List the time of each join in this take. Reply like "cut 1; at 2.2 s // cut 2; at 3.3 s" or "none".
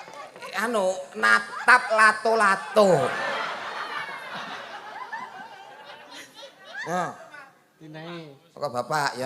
cut 1; at 4.4 s

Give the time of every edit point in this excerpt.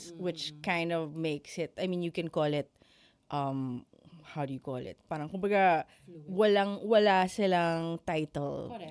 none

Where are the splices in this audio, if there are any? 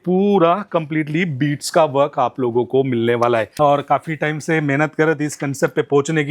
cut 1; at 3.5 s

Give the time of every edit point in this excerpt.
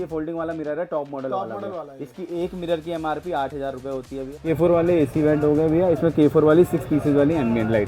cut 1; at 4.3 s

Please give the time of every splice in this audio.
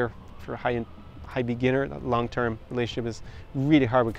none

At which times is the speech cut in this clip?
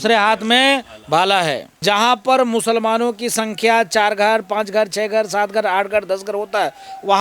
cut 1; at 1.7 s

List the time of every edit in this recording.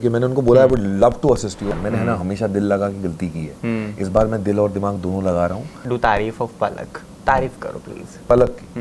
cut 1; at 1.6 s // cut 2; at 5.7 s

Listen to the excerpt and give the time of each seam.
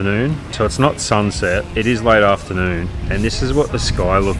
cut 1; at 1.7 s // cut 2; at 3.0 s

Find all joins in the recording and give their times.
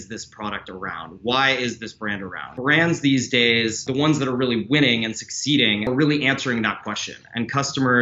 cut 1; at 2.4 s // cut 2; at 3.9 s // cut 3; at 5.9 s

